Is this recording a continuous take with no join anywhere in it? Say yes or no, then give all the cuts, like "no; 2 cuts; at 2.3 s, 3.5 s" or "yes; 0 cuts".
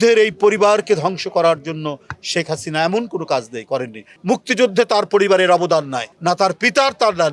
no; 2 cuts; at 4.1 s, 6.0 s